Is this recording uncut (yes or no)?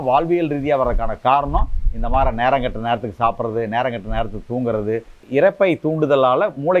no